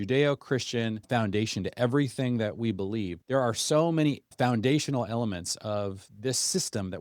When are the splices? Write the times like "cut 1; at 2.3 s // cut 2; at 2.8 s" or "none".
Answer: cut 1; at 1.0 s // cut 2; at 3.2 s // cut 3; at 4.3 s